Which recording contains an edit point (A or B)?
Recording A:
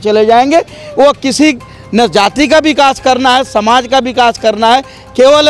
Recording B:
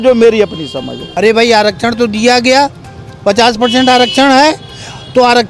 B